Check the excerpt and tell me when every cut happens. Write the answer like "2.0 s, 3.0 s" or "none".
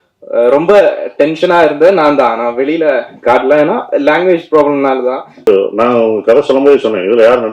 5.5 s